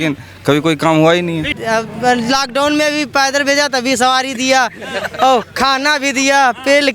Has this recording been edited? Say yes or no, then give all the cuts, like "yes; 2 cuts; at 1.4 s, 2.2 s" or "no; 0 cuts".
yes; 1 cut; at 1.5 s